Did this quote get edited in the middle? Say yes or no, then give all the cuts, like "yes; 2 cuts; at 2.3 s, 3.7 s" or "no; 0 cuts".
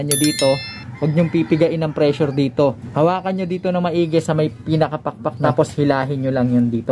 yes; 2 cuts; at 2.8 s, 5.4 s